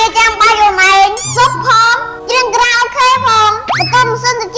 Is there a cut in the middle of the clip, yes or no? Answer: no